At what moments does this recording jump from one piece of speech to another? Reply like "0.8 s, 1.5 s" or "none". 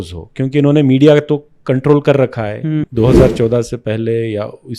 2.8 s